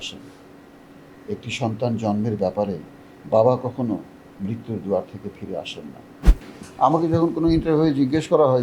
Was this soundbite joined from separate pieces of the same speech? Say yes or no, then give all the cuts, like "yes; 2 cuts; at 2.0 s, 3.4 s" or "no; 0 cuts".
yes; 1 cut; at 6.2 s